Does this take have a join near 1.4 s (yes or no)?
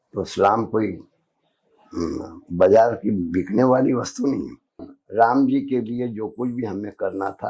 no